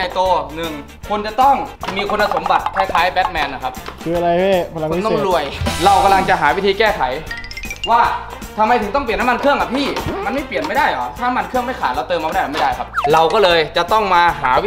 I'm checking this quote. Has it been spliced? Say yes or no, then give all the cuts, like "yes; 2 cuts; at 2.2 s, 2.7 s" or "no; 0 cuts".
yes; 3 cuts; at 5.6 s, 10.1 s, 13.0 s